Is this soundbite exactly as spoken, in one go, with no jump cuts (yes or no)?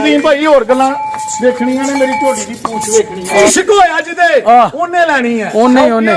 no